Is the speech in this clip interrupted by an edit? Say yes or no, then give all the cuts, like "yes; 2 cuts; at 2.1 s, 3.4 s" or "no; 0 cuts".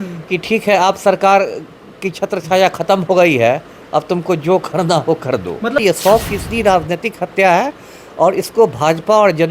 yes; 1 cut; at 5.8 s